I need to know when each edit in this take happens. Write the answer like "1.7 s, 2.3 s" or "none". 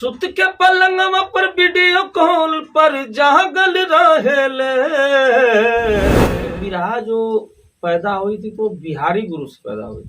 6.3 s